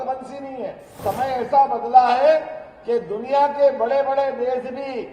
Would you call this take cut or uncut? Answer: cut